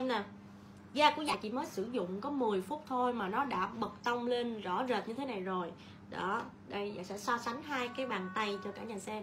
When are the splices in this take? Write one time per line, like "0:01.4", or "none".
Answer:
0:01.3

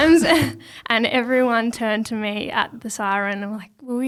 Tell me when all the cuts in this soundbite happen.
none

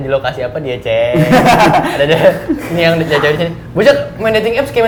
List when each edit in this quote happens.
none

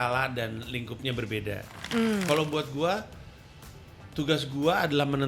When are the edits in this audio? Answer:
0:01.7

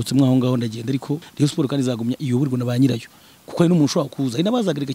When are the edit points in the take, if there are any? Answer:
0:01.3

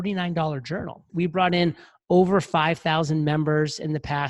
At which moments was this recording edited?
0:01.0

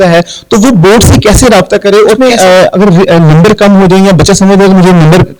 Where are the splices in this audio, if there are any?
0:02.2

